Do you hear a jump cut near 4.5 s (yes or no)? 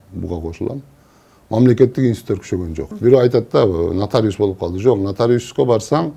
no